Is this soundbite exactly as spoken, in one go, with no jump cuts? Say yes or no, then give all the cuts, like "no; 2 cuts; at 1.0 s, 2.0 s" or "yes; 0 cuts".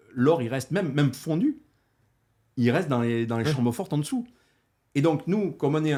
yes; 0 cuts